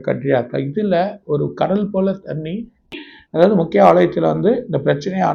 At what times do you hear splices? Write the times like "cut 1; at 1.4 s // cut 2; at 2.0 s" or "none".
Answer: cut 1; at 2.9 s

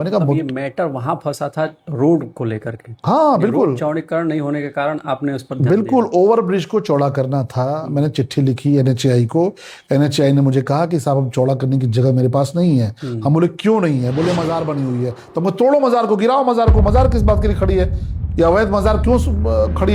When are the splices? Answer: none

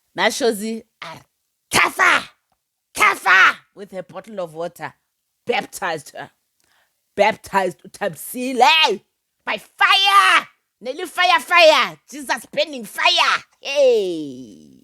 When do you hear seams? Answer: none

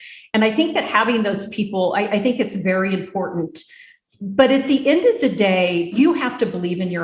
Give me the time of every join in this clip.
cut 1; at 5.9 s

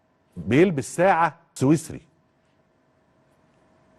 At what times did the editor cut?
cut 1; at 1.4 s

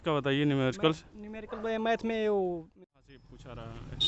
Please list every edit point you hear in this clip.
cut 1; at 2.7 s

